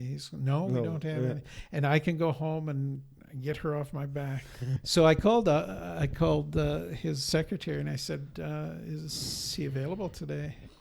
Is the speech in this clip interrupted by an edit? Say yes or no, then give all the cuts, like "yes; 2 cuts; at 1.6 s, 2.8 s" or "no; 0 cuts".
yes; 1 cut; at 4.8 s